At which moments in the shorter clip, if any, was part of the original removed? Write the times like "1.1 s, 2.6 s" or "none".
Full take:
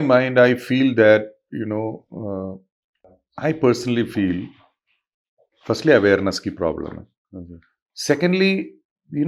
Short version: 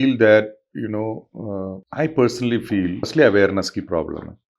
1.8 s, 3.1 s